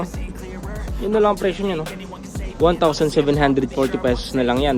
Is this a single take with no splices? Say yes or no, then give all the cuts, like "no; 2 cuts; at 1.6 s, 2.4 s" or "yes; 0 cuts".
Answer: yes; 0 cuts